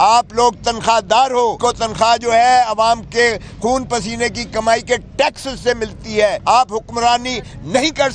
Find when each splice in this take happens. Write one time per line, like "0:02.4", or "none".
0:01.6
0:06.4